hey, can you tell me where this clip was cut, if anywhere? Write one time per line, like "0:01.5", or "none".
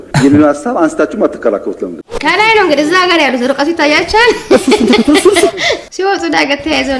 0:02.0
0:05.8